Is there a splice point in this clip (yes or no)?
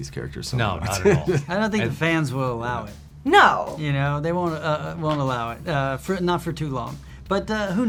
no